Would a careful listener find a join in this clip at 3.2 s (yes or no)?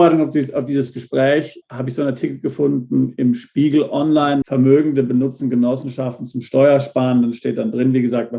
no